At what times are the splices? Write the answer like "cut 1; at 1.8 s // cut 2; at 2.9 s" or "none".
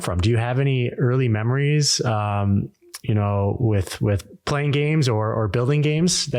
none